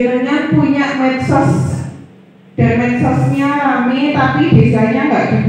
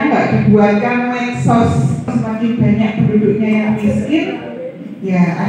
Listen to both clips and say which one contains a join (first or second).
second